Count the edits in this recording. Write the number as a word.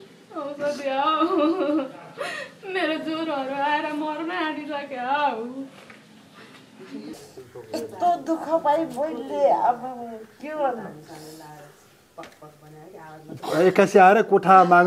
one